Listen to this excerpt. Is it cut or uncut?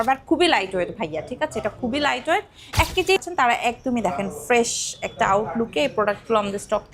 cut